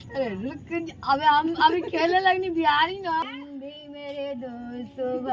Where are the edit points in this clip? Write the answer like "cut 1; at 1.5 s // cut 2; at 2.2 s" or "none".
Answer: cut 1; at 3.2 s